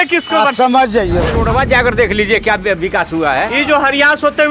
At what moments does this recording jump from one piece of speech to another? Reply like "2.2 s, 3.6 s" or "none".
1.3 s